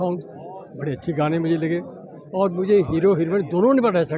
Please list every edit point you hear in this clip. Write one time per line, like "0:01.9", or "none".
none